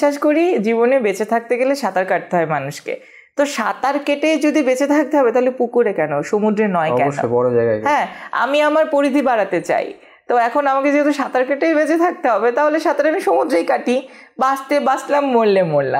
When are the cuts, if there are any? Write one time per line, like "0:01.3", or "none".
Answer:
none